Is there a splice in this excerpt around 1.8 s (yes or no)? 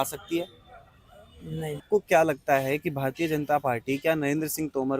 yes